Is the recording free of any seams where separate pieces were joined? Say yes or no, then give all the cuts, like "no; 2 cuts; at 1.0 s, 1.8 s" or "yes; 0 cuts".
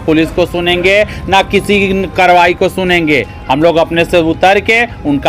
yes; 0 cuts